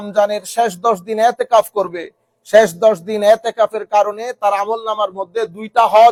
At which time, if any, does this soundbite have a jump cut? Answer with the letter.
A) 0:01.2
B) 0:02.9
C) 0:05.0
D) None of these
D